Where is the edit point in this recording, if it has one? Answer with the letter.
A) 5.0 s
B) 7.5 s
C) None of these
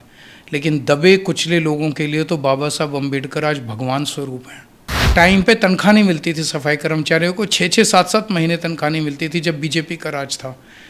A